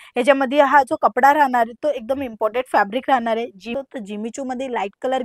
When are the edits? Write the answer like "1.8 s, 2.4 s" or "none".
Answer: 3.7 s